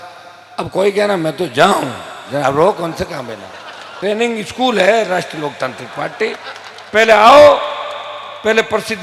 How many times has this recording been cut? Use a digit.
1